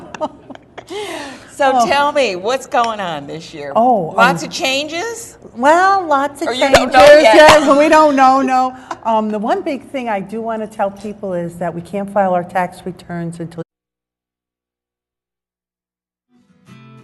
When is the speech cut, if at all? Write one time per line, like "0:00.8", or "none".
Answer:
none